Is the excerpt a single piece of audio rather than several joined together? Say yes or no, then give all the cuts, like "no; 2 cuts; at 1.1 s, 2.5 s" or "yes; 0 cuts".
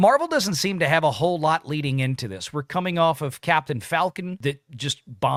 yes; 0 cuts